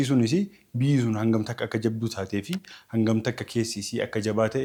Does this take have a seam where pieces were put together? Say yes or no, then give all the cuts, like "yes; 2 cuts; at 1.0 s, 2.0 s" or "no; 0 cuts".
no; 0 cuts